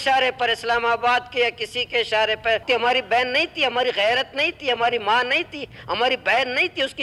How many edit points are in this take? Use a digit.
1